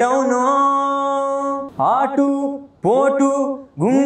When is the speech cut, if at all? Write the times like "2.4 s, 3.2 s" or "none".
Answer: 1.7 s

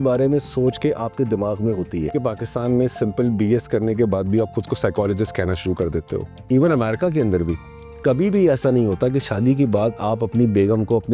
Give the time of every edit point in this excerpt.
2.1 s, 6.3 s

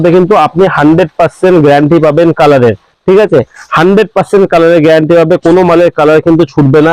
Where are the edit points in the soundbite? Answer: none

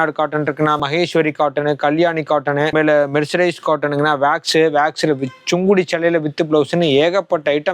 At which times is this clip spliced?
0.8 s, 2.7 s

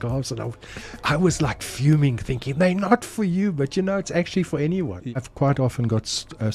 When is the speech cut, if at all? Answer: 5.1 s

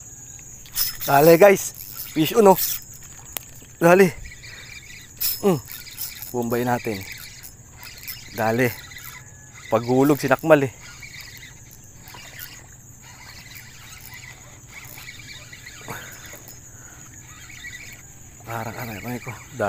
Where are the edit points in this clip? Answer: none

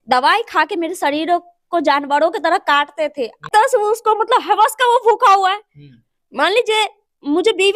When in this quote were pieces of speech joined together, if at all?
3.5 s

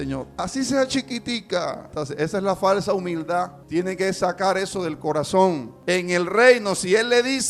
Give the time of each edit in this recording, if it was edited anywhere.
1.9 s, 3.6 s, 5.7 s

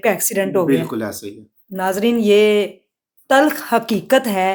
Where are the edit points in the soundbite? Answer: none

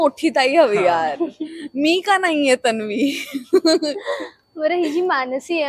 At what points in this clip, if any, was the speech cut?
none

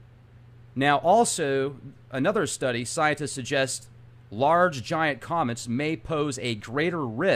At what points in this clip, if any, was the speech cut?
none

